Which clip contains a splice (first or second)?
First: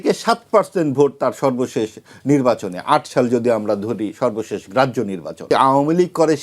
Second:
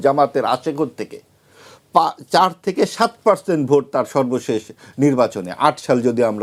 first